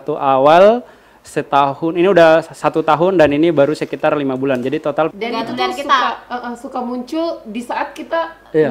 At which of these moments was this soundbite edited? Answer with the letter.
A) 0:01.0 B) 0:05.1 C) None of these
B